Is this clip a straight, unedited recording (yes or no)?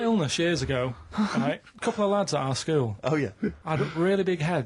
no